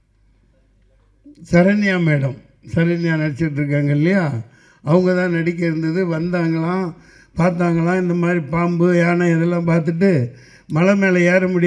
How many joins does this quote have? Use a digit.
0